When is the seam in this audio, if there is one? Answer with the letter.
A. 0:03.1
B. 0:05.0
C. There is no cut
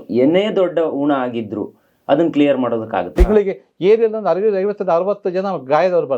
A